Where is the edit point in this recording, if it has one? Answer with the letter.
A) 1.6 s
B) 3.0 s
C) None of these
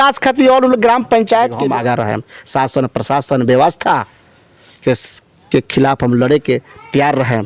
A